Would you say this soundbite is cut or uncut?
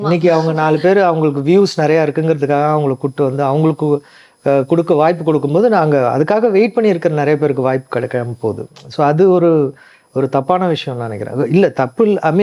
uncut